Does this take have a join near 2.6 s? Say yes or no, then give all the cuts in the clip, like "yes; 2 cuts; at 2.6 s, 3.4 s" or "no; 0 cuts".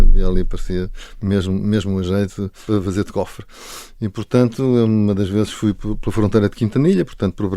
yes; 1 cut; at 2.6 s